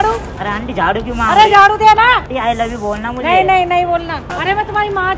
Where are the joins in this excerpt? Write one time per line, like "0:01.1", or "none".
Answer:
0:02.3
0:04.3